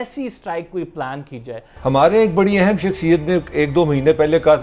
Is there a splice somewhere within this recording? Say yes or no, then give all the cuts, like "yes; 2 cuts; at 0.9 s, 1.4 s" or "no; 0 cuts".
yes; 1 cut; at 1.7 s